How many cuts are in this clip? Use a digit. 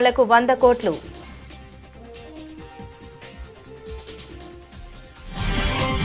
0